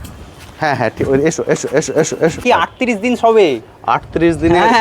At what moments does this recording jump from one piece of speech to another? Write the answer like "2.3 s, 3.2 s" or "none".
2.4 s